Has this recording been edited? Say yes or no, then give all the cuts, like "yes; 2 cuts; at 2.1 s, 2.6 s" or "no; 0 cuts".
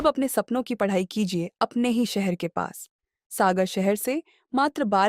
no; 0 cuts